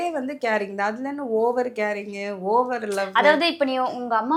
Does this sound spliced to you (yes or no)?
no